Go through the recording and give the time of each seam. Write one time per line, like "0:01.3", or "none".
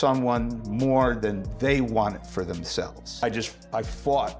0:03.1